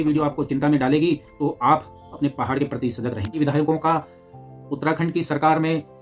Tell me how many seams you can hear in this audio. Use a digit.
1